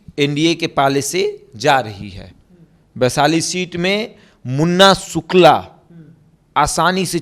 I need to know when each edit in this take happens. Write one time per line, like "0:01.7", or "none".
none